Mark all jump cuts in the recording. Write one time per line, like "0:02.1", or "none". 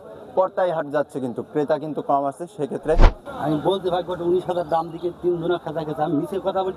0:03.2